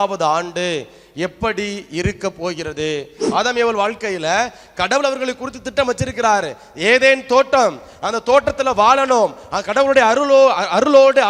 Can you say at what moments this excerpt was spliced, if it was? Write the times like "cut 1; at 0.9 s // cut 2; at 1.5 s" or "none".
cut 1; at 3.1 s

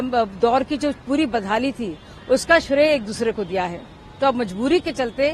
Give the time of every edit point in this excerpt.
none

